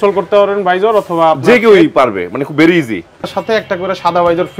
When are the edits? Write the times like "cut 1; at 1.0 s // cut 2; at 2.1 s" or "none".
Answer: cut 1; at 3.4 s